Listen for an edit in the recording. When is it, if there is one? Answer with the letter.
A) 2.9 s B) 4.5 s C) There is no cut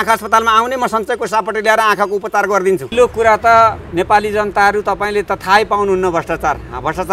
A